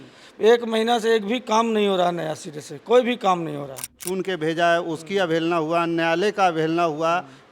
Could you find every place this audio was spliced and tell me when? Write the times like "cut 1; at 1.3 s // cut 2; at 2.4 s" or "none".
cut 1; at 4.0 s